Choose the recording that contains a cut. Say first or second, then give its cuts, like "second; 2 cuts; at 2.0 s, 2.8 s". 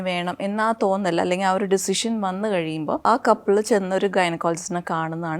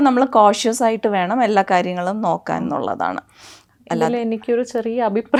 first; 1 cut; at 3.0 s